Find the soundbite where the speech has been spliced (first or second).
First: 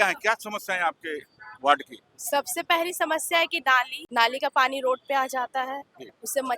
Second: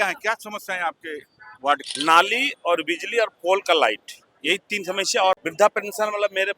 second